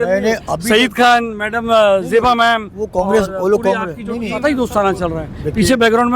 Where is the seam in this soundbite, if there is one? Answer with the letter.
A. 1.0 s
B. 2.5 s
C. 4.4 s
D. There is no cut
C